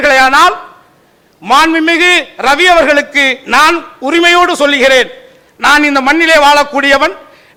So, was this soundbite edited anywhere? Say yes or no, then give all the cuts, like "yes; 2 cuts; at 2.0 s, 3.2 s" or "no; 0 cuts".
no; 0 cuts